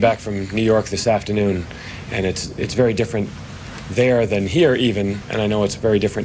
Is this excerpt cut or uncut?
uncut